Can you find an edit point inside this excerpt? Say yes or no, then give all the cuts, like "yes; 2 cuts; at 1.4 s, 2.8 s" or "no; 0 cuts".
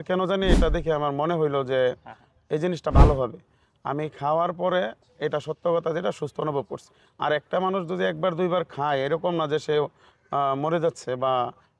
no; 0 cuts